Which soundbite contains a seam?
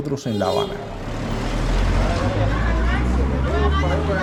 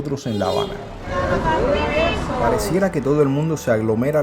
second; 2 cuts; at 1.2 s, 2.6 s

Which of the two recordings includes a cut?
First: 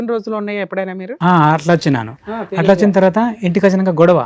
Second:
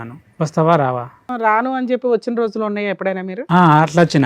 second; 1 cut; at 1.3 s

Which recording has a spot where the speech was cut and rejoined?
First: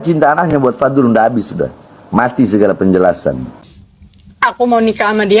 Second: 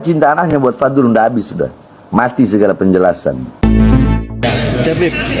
first; 1 cut; at 3.5 s

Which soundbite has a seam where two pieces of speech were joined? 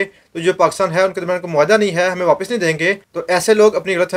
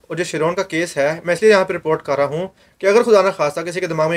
first; 1 cut; at 3.1 s

